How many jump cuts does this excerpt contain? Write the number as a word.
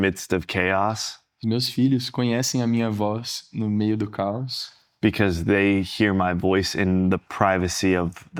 zero